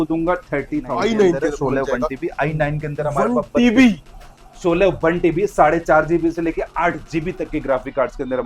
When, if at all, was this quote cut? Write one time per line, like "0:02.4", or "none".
0:00.9